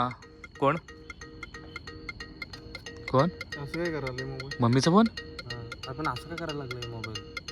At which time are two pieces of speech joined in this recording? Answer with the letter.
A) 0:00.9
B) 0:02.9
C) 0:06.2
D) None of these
D